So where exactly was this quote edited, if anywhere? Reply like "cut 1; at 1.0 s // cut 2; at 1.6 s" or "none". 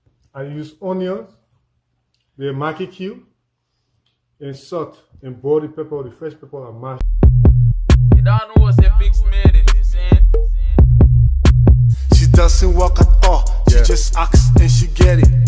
cut 1; at 7.1 s